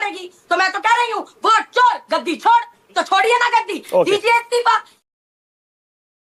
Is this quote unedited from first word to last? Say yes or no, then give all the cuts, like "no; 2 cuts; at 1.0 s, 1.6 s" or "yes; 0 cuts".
yes; 0 cuts